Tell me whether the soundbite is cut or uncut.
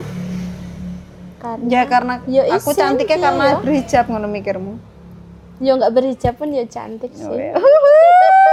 uncut